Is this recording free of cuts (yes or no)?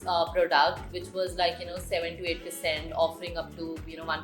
no